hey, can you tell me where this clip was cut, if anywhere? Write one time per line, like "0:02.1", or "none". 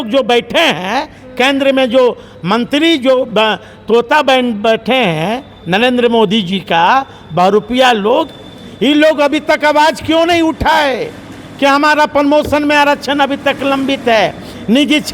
none